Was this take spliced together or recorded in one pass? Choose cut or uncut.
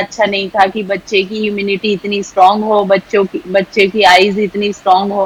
uncut